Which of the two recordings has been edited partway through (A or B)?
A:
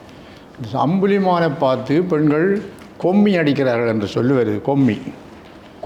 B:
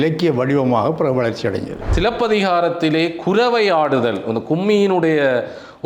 B